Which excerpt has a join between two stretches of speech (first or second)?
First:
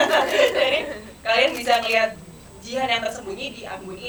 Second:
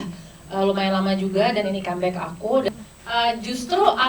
second